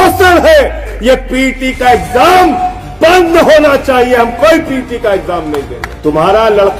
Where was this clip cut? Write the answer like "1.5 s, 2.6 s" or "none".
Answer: 0.9 s, 5.8 s